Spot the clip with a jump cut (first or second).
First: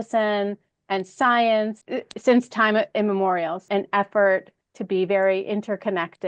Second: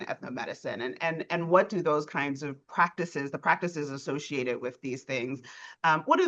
first